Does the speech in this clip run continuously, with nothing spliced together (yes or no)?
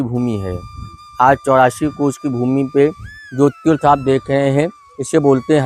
yes